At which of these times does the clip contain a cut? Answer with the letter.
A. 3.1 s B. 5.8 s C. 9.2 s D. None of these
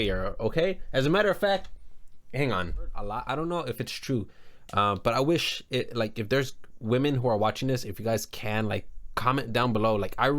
A